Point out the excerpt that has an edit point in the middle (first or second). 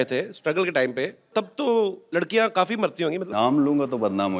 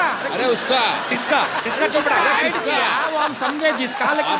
first